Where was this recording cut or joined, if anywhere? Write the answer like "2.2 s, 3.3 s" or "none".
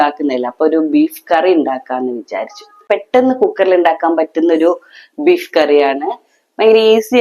2.8 s